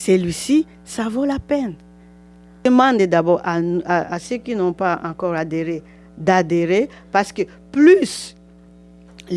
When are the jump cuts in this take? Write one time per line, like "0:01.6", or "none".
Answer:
0:02.6

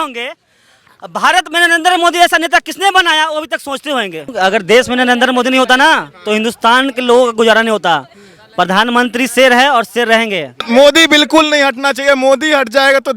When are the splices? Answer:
0:04.3
0:10.7

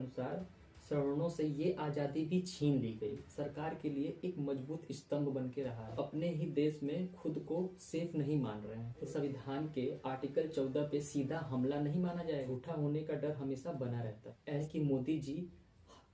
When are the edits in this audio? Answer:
0:03.2
0:05.9
0:09.1
0:12.5
0:14.6

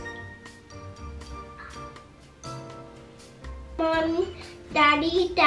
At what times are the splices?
none

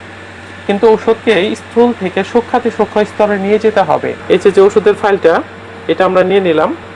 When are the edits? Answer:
0:04.1

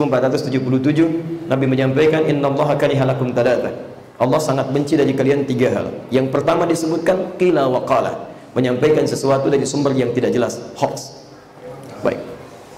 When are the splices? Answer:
none

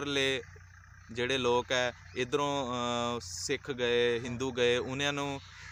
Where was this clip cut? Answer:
none

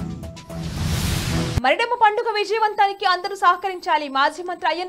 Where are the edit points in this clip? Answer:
0:01.5

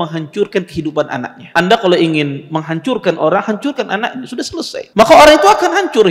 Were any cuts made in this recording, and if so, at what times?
0:01.4
0:04.8

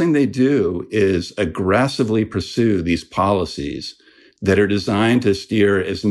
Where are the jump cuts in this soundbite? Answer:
none

